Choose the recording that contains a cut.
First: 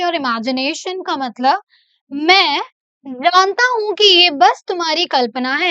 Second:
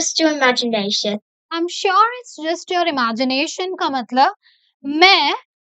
second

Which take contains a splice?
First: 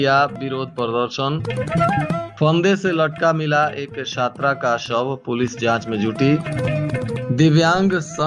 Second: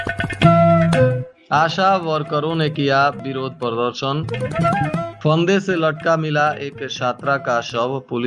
second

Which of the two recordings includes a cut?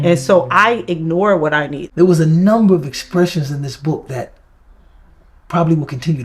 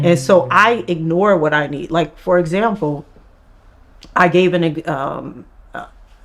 first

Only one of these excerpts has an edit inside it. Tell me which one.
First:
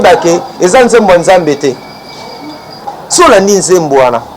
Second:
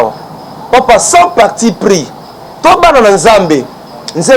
first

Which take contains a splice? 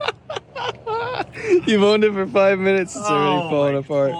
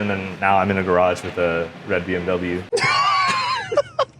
second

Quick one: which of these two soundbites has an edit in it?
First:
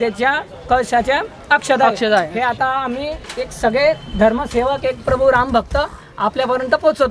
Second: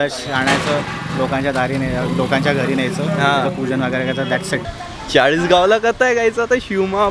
second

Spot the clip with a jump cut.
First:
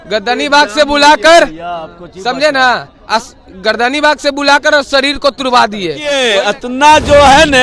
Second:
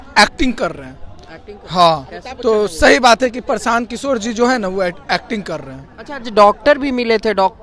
first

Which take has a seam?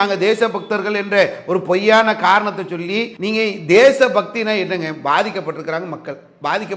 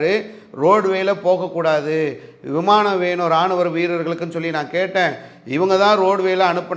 first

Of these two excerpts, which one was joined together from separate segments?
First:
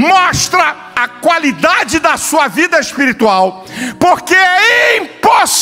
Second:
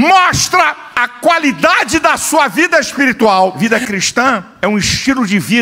second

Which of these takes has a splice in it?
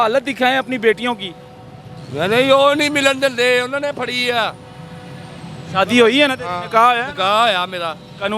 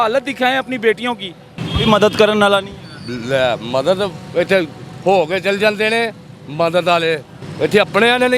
second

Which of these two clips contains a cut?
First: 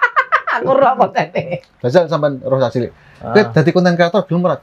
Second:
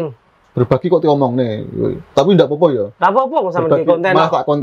first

